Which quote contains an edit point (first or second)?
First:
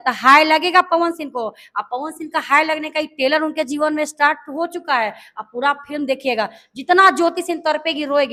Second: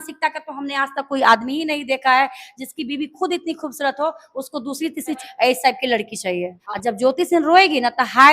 second